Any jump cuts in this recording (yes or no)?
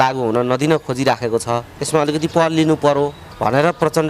yes